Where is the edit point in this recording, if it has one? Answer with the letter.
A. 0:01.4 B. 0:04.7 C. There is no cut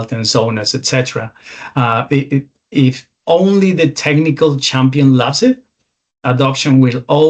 C